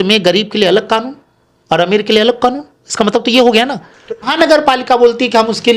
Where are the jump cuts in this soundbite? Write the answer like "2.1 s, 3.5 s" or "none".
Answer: 4.3 s

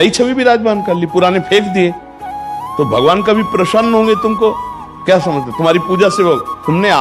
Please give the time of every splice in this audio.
none

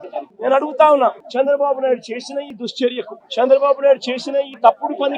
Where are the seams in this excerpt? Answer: none

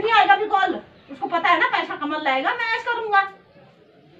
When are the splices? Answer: none

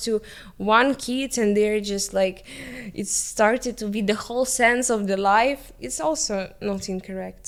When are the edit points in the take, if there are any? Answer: none

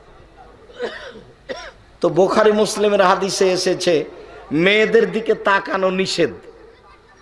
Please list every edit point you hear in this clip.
none

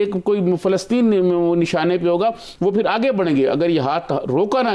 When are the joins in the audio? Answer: none

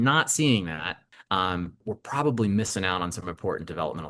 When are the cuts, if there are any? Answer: 1.8 s

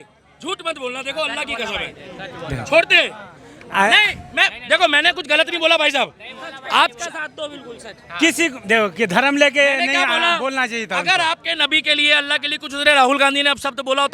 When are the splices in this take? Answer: none

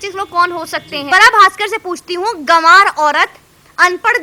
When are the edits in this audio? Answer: 1.1 s

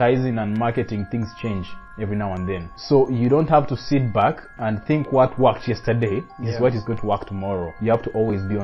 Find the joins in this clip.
2.7 s, 4.5 s, 7.7 s

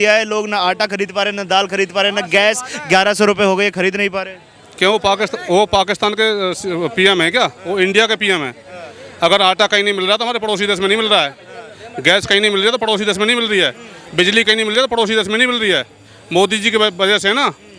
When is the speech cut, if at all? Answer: none

